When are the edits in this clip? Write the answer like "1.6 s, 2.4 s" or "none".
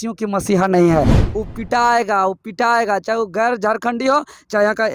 1.2 s